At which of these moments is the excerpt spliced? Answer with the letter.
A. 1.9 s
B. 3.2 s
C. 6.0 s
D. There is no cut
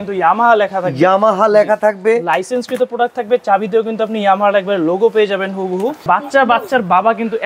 C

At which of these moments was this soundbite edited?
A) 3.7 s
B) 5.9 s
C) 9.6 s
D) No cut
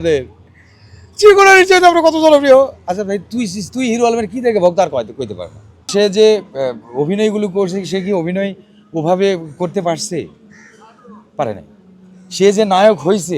B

